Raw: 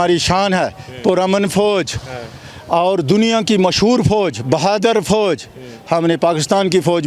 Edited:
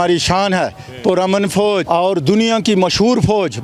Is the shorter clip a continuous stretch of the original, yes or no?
no